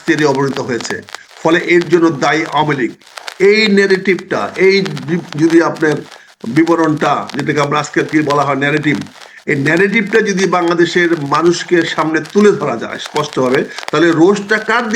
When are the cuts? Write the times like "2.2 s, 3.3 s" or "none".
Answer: none

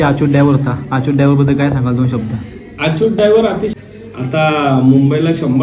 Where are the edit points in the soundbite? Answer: 3.7 s

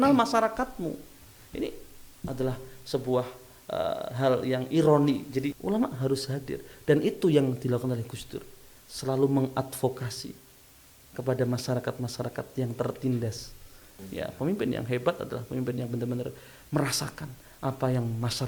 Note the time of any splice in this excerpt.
5.6 s, 14.0 s

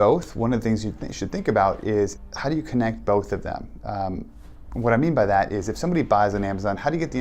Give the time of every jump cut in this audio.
2.2 s

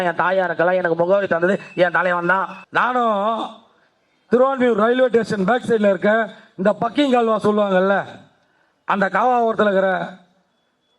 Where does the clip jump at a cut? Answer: 2.6 s

